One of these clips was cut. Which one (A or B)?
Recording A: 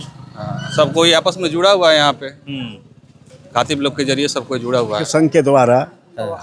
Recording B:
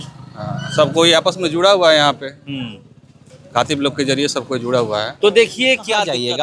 A